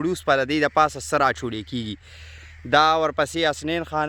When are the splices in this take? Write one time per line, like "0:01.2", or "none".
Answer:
none

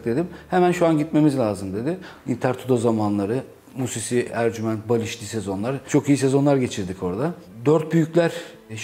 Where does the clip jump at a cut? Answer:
none

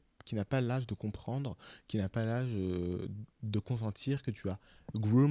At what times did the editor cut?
none

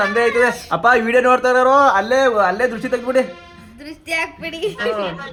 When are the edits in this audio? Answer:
none

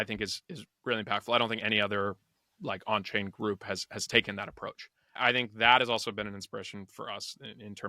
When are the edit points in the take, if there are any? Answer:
0:05.2

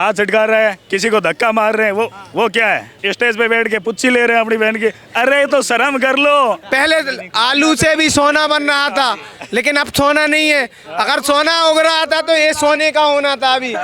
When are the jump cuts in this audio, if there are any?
0:02.9
0:06.6

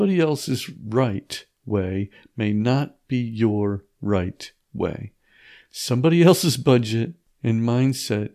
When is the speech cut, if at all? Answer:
0:07.2

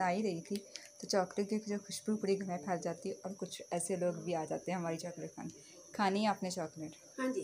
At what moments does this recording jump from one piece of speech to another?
none

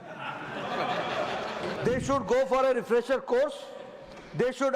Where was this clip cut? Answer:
0:01.7

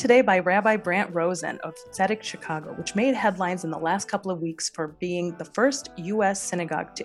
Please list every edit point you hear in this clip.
none

